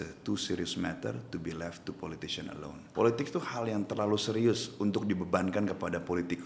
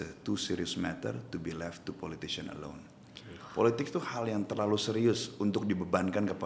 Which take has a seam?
first; 1 cut; at 2.8 s

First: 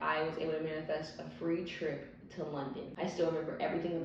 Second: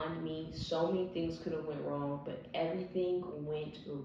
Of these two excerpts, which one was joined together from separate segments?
first; 1 cut; at 2.9 s

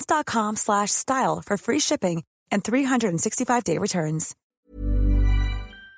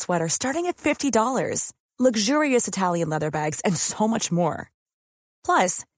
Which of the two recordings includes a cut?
first; 1 cut; at 4.4 s

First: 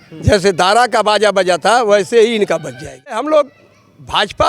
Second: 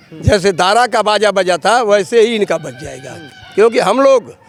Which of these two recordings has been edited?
first; 1 cut; at 3.2 s

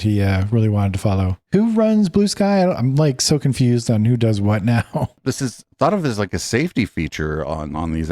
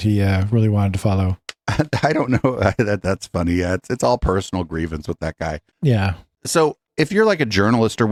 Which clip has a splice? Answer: first; 2 cuts; at 1.3 s, 5.2 s

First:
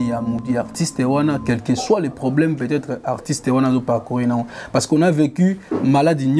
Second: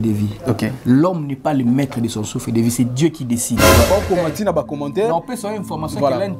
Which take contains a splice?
second; 1 cut; at 3.9 s

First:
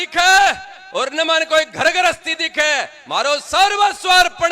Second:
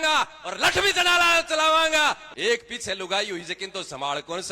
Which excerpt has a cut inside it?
second; 1 cut; at 2.3 s

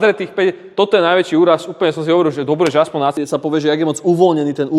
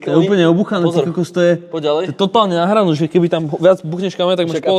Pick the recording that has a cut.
first; 1 cut; at 3.2 s

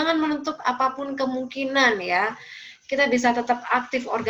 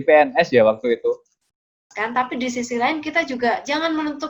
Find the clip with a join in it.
second; 1 cut; at 1.4 s

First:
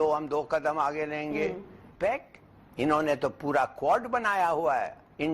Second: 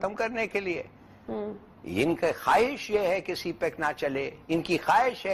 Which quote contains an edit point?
first; 1 cut; at 1.9 s

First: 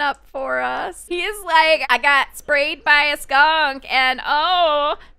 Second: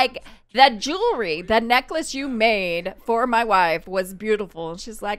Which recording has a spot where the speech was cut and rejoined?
first; 1 cut; at 1.0 s

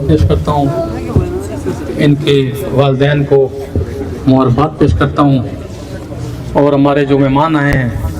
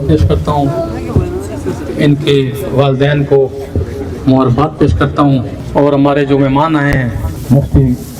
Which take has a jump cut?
second; 2 cuts; at 5.6 s, 7.3 s

